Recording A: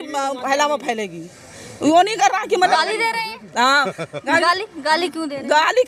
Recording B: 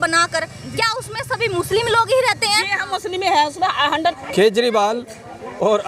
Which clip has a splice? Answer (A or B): B